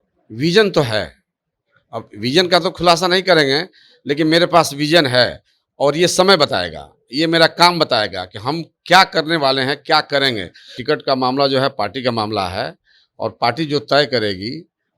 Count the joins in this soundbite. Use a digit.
1